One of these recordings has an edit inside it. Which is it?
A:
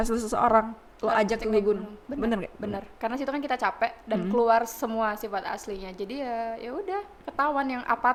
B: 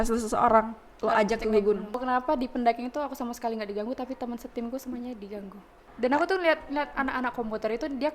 B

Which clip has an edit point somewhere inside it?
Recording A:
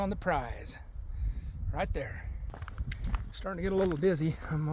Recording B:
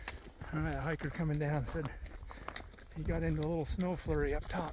A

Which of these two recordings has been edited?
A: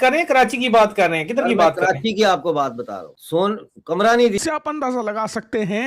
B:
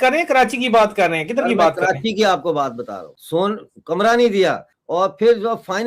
A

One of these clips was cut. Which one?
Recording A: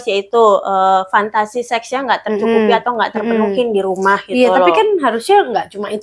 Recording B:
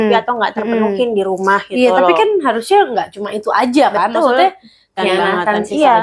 B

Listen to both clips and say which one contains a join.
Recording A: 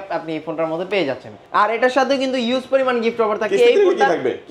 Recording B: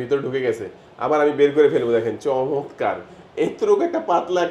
A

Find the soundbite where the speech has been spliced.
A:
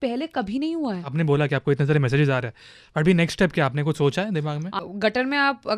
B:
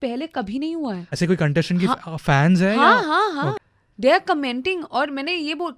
A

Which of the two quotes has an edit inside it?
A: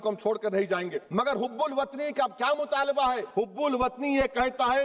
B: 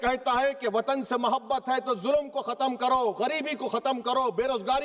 A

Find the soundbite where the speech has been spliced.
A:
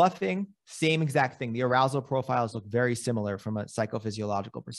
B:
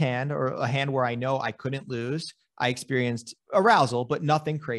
B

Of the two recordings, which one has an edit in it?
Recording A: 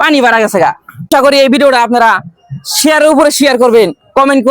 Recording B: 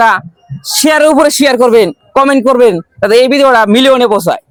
A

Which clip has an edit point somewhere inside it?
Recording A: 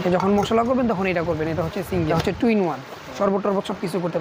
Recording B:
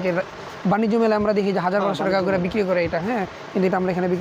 A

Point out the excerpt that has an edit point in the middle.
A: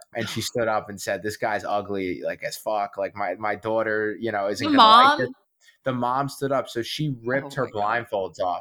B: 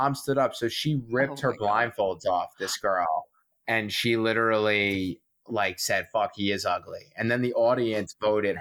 B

